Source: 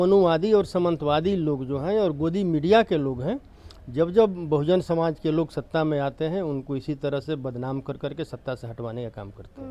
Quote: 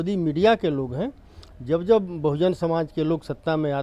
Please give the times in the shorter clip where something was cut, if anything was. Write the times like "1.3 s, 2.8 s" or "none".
none